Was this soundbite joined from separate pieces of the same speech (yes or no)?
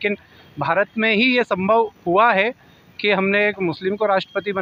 no